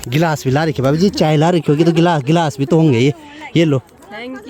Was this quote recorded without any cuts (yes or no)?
yes